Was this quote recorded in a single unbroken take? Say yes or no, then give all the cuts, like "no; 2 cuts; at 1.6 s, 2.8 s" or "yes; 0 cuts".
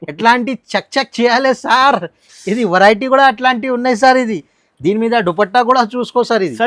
yes; 0 cuts